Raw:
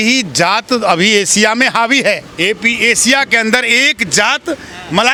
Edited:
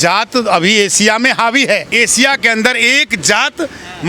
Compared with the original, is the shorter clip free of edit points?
no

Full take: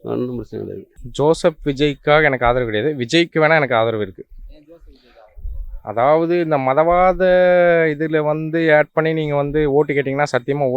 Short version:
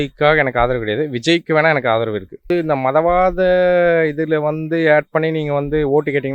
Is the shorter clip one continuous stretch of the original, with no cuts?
no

